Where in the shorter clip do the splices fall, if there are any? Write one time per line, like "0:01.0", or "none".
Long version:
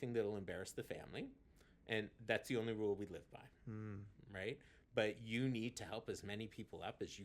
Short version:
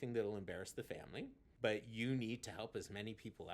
0:01.4